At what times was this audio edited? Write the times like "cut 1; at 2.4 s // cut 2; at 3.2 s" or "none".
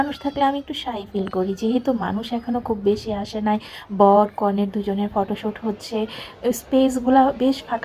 none